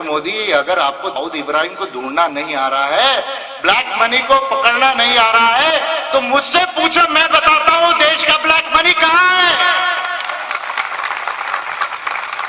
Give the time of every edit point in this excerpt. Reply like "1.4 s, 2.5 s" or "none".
1.2 s